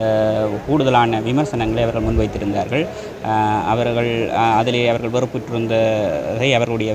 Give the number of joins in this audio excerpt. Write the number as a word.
zero